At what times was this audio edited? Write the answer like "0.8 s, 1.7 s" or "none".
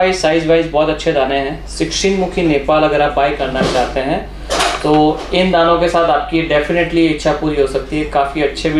none